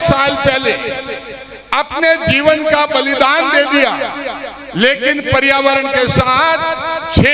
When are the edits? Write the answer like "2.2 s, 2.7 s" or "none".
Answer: none